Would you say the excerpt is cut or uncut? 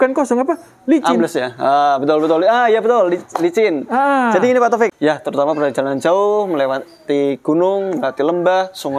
cut